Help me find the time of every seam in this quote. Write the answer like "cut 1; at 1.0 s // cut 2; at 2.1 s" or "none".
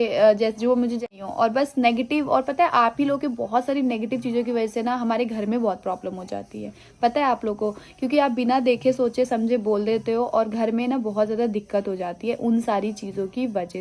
cut 1; at 1.1 s